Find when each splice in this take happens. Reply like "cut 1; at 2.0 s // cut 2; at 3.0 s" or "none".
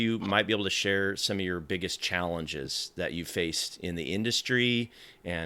none